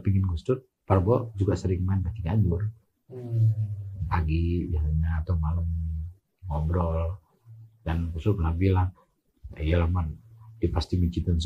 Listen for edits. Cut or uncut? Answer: uncut